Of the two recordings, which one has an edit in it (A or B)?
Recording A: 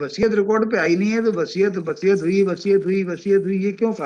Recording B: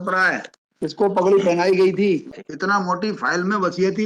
B